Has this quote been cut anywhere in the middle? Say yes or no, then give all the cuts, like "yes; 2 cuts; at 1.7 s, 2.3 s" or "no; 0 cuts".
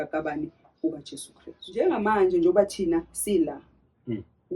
yes; 1 cut; at 1.6 s